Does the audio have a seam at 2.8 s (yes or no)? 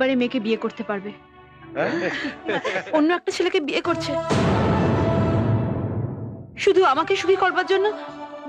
yes